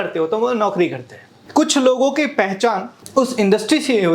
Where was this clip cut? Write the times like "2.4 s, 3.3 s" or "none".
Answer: 1.3 s, 2.9 s